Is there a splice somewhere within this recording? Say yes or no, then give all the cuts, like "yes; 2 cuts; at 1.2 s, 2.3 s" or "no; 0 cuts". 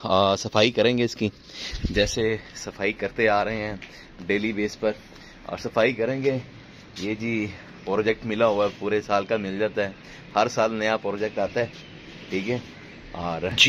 no; 0 cuts